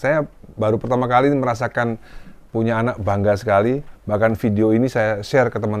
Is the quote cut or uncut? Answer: uncut